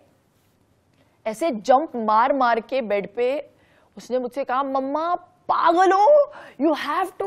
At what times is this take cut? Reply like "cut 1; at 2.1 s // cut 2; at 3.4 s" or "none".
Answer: none

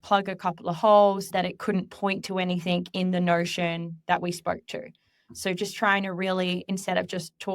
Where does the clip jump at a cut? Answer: cut 1; at 1.3 s

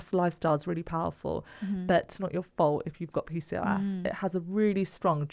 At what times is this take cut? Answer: cut 1; at 2.2 s

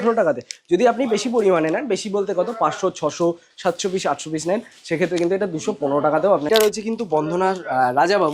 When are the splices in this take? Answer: cut 1; at 6.5 s

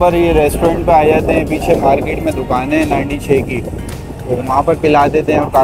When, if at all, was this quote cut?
none

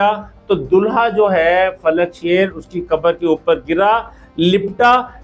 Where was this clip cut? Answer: none

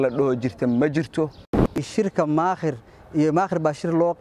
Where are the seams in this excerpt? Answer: cut 1; at 1.8 s

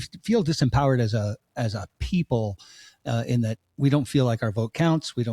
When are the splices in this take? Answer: none

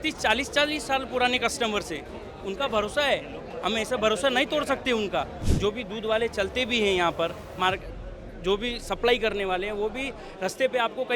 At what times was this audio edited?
cut 1; at 5.4 s

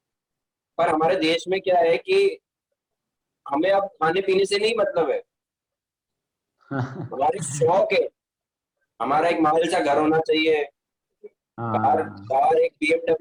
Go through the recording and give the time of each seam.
none

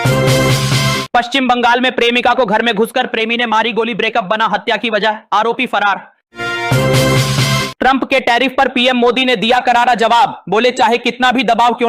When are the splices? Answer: cut 1; at 1.0 s

